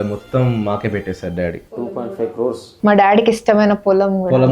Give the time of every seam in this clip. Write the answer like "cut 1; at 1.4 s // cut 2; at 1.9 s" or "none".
cut 1; at 2.7 s